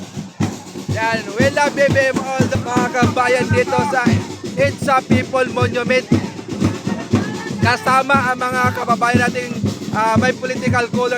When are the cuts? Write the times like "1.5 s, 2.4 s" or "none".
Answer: 2.6 s